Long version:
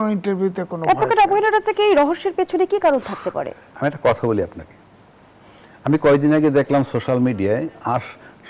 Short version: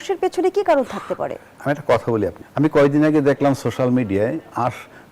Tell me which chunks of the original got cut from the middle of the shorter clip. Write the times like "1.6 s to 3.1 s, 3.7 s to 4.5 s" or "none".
4.6 s to 5.7 s